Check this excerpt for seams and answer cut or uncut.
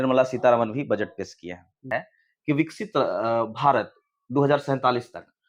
cut